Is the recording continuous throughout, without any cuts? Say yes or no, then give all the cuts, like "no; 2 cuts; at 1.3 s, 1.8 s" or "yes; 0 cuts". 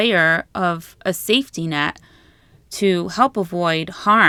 yes; 0 cuts